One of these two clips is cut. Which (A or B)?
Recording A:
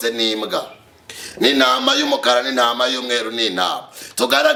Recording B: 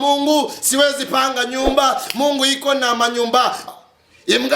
B